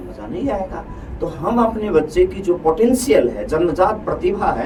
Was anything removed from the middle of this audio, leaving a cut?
no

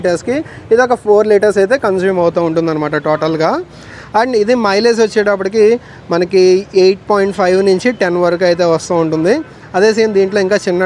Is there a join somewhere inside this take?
no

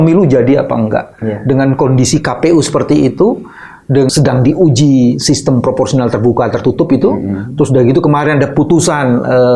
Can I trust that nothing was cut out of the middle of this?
no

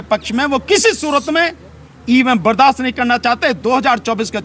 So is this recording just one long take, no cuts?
yes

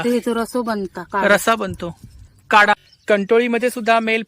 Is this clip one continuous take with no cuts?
no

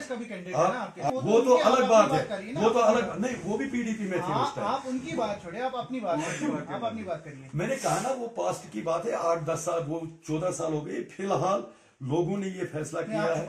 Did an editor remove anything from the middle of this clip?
yes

